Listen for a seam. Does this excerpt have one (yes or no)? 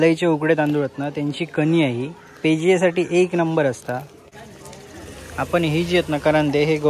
yes